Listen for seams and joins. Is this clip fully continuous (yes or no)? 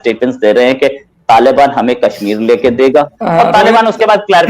no